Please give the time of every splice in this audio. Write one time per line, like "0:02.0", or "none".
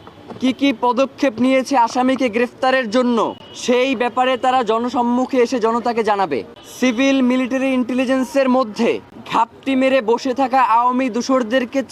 0:03.5
0:06.6
0:09.1